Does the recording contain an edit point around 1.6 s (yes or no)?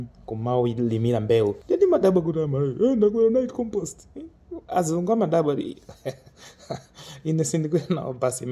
yes